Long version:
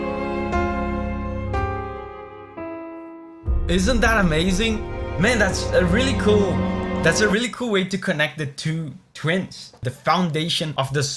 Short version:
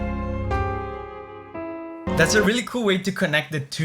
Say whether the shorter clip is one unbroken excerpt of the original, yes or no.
no